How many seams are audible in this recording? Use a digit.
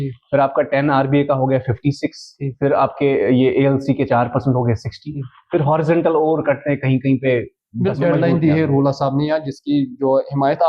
1